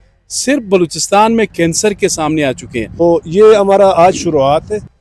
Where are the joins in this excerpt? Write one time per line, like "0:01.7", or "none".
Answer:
0:03.0